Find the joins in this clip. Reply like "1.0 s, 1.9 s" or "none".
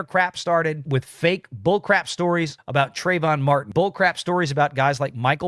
0.8 s, 2.6 s, 3.7 s